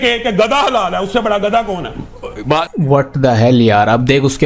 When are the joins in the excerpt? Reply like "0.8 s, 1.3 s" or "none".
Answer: none